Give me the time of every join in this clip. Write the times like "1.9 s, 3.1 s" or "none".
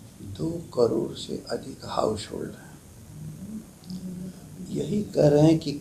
none

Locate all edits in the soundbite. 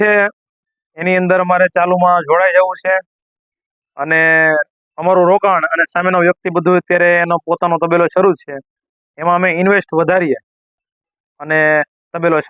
none

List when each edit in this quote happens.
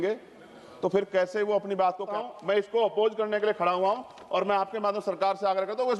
2.1 s

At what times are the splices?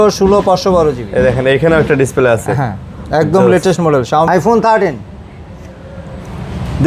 4.3 s

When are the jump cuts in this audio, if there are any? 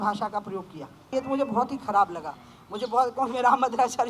1.1 s

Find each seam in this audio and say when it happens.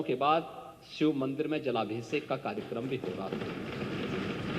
none

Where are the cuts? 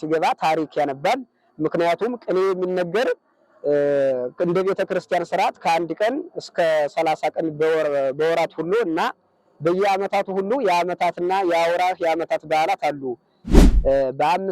13.5 s

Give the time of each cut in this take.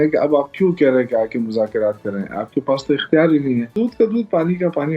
3.7 s

